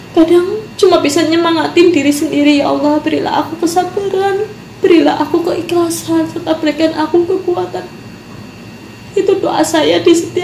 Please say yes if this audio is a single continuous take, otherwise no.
yes